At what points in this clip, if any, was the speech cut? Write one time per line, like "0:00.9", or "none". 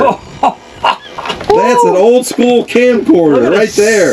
0:01.4